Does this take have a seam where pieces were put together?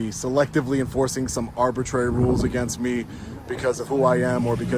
no; 0 cuts

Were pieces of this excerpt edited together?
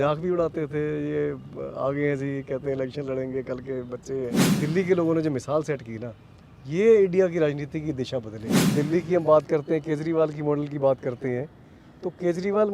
yes; 2 cuts; at 4.4 s, 8.7 s

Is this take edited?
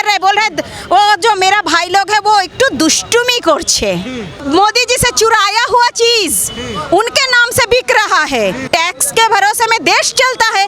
yes; 2 cuts; at 4.4 s, 8.7 s

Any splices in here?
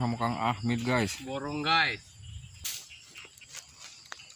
yes; 1 cut; at 2.7 s

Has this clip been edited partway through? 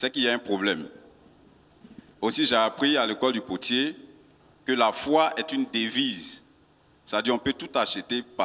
no; 0 cuts

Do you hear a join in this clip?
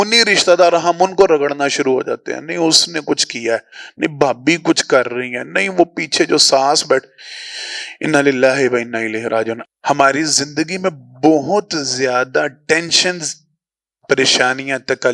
yes; 1 cut; at 9.6 s

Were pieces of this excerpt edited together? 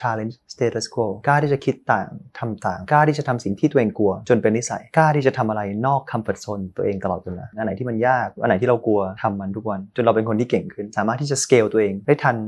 no; 0 cuts

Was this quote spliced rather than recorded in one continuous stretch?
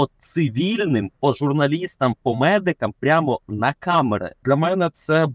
yes; 1 cut; at 4.4 s

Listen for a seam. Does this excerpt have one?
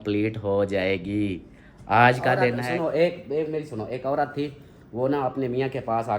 yes; 1 cut; at 2.6 s

